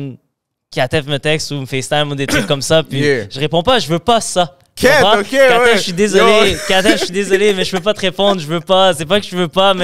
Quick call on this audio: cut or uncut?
uncut